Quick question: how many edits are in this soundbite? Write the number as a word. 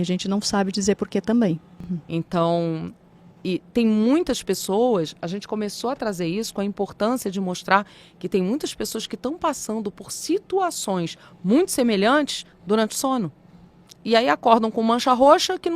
one